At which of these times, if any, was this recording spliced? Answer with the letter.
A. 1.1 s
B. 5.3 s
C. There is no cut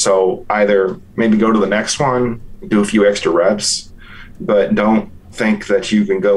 B